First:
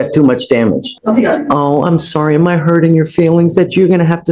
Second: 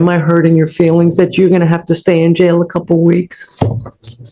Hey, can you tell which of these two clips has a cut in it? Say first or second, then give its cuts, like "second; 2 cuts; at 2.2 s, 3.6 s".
first; 1 cut; at 0.9 s